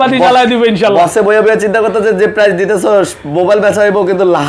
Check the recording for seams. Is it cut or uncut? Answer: uncut